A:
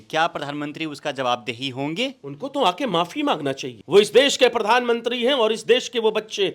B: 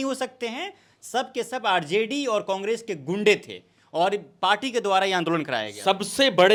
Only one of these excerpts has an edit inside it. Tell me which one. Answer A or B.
A